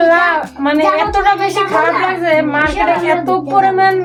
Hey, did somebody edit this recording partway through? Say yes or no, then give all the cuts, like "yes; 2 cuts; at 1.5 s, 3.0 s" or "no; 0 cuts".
no; 0 cuts